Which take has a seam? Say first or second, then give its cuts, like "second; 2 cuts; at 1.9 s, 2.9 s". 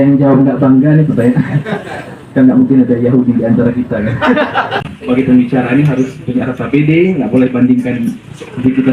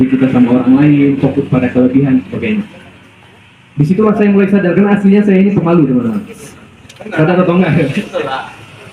first; 1 cut; at 4.9 s